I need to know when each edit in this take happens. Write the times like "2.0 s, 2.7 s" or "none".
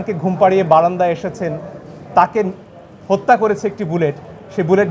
none